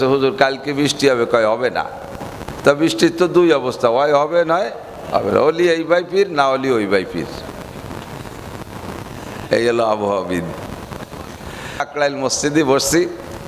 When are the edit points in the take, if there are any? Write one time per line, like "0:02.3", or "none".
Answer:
0:11.8